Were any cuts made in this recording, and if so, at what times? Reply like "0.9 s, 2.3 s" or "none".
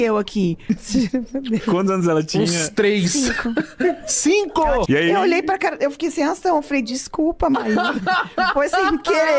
0.7 s, 4.8 s

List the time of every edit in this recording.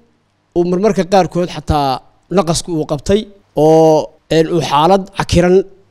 3.4 s, 4.2 s

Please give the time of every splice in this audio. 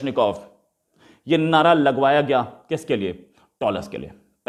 none

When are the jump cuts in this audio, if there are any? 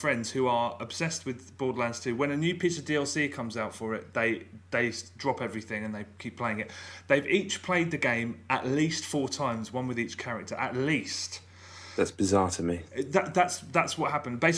none

